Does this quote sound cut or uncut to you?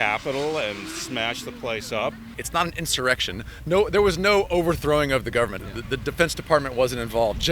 cut